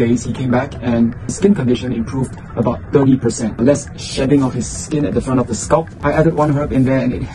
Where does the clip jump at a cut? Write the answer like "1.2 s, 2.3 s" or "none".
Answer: 1.4 s, 3.6 s, 5.9 s